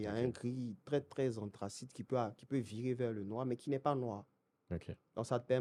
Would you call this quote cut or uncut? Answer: uncut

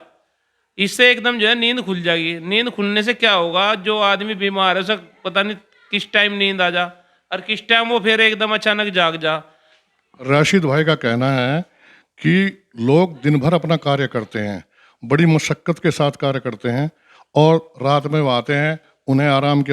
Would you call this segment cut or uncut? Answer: uncut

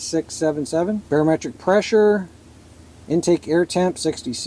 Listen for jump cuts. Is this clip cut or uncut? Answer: cut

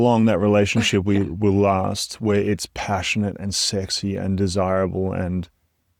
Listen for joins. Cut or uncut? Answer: uncut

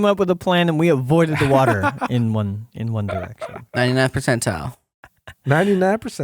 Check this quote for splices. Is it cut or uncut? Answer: uncut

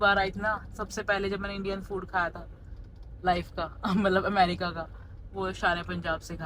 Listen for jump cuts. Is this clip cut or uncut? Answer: uncut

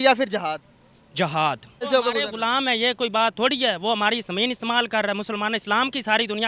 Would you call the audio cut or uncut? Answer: cut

